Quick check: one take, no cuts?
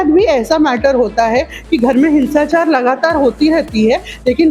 yes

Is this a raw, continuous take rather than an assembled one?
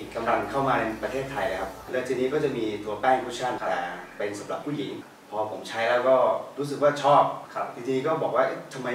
no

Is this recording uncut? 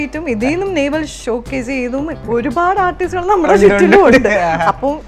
no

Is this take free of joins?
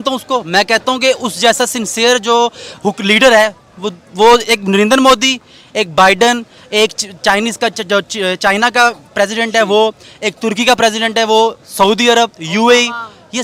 yes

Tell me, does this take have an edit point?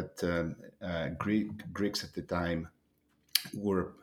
no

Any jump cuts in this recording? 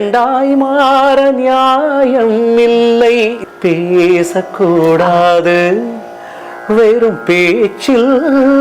yes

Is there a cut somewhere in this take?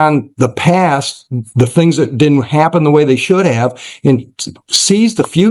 no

